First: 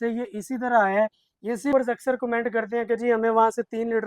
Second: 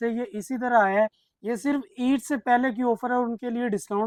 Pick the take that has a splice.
first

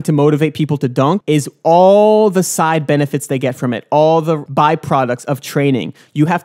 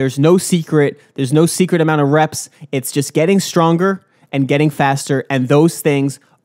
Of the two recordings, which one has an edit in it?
first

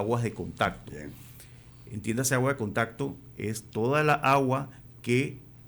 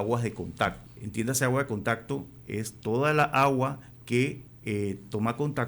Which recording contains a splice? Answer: second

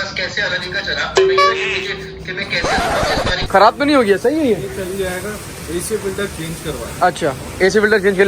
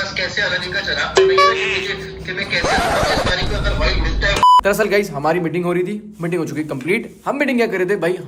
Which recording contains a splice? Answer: first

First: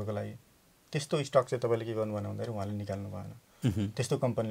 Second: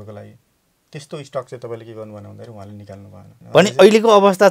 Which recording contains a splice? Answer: second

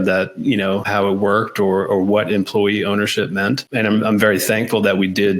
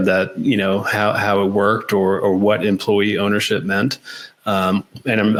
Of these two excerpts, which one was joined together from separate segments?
first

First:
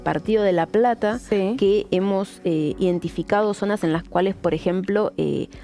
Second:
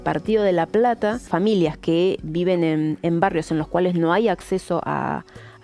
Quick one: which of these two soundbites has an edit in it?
second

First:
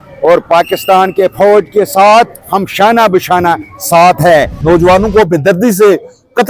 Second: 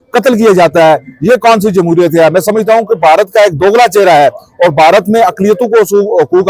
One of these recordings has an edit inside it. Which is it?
first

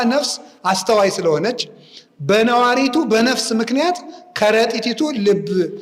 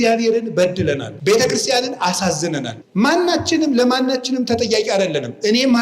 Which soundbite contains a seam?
second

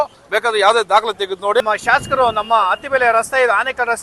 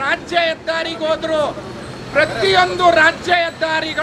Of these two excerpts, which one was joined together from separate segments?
first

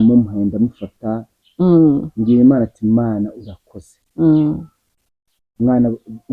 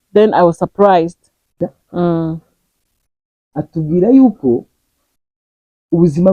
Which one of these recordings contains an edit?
second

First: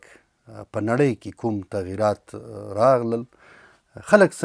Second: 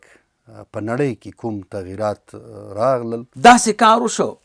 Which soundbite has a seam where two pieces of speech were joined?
second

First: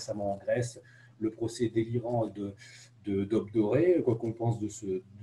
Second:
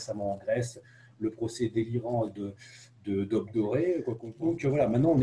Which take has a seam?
second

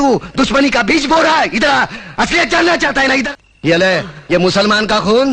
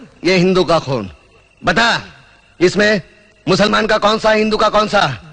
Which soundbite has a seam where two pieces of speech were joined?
first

